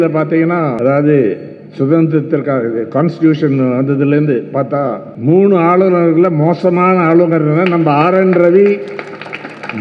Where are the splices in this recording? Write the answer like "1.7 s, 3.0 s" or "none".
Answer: 0.8 s, 5.1 s